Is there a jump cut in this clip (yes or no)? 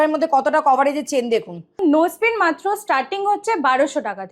yes